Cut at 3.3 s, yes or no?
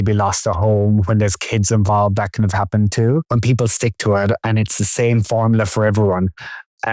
yes